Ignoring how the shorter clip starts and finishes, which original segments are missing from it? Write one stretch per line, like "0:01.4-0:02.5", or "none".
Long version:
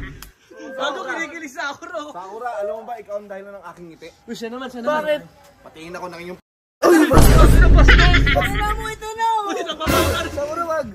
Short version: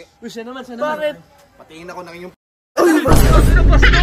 none